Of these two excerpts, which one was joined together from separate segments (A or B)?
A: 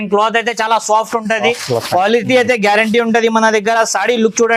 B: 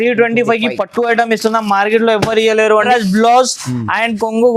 B